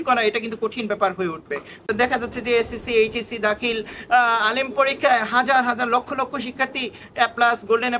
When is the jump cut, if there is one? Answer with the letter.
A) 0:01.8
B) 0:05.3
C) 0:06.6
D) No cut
A